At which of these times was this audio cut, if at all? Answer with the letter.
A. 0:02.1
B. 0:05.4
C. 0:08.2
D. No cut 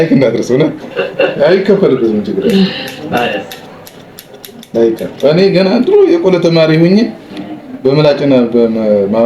D